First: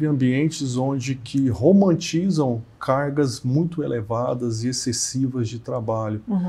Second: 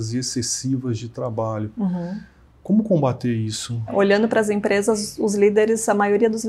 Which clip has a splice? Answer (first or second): second